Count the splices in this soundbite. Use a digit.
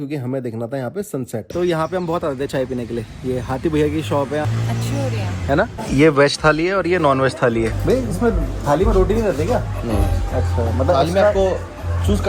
4